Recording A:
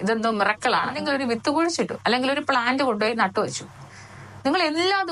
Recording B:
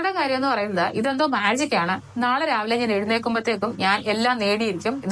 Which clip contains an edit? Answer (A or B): A